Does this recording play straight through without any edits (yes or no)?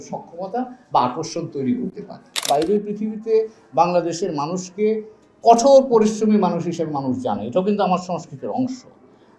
no